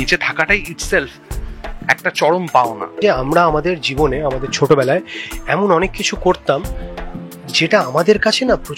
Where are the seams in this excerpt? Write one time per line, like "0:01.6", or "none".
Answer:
0:03.0